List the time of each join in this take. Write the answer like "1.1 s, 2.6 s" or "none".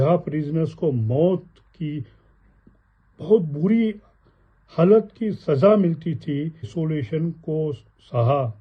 6.7 s